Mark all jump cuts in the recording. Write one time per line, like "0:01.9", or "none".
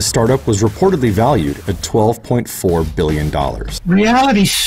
0:03.7